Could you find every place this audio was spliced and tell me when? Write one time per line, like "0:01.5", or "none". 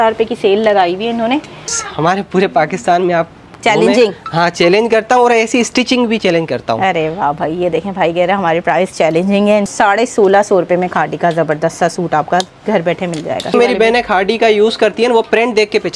0:01.7
0:09.7
0:13.5